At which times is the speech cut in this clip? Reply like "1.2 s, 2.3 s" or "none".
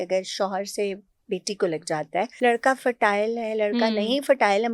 2.3 s

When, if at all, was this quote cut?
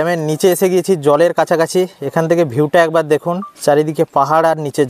3.5 s

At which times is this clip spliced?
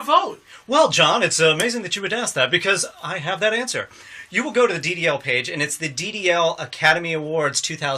1.9 s

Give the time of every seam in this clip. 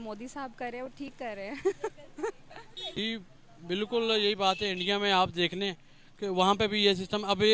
2.8 s

